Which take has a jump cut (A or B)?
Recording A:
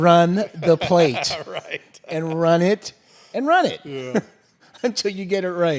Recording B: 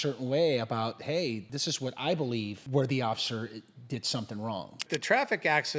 B